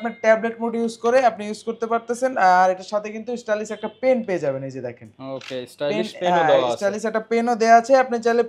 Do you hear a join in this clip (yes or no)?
no